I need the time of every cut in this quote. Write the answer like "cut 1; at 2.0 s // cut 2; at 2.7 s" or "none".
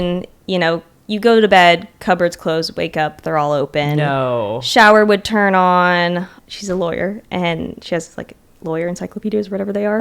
cut 1; at 6.4 s